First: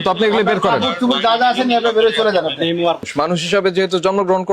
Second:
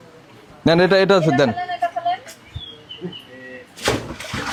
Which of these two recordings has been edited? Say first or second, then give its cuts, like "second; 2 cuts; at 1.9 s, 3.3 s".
first; 1 cut; at 3.1 s